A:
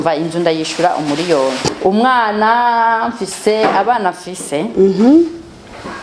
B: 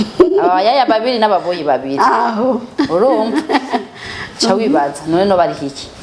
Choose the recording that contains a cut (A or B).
A